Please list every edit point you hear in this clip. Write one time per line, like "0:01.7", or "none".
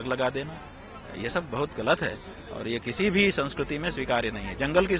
none